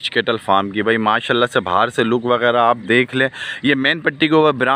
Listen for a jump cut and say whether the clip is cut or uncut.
uncut